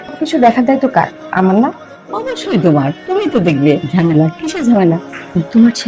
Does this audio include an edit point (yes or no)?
no